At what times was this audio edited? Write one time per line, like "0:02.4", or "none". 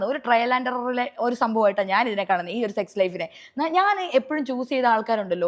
0:02.0